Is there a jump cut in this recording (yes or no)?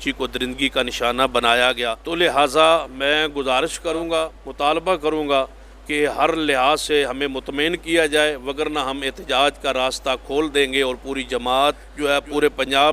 yes